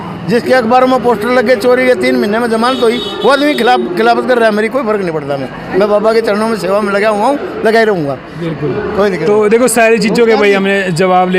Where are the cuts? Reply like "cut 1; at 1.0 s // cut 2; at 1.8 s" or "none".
none